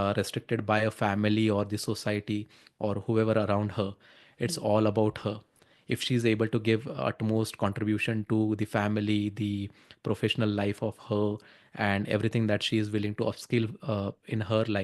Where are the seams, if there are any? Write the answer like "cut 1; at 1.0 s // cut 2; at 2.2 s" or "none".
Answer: none